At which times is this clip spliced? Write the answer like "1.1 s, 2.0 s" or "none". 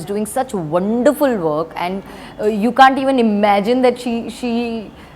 none

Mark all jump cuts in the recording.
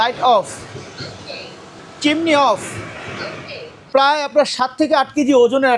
1.8 s, 3.9 s

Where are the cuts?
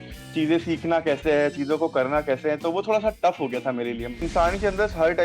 4.2 s

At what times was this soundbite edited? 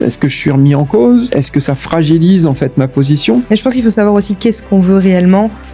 1.4 s, 3.5 s

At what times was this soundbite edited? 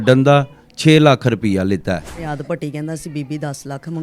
2.3 s

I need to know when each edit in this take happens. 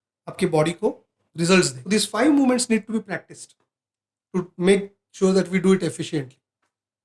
1.8 s

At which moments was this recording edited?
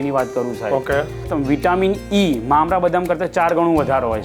1.3 s

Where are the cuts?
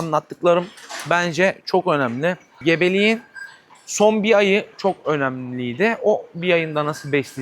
2.5 s

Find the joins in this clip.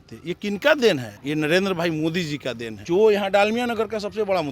1.1 s, 2.7 s

